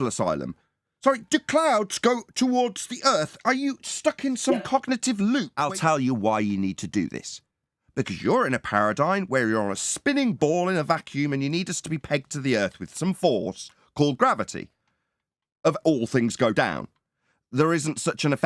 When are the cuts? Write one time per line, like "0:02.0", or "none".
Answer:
0:05.5